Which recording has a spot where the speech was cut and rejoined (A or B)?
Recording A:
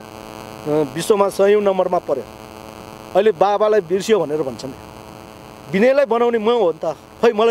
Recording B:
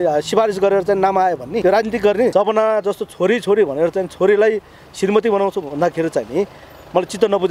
B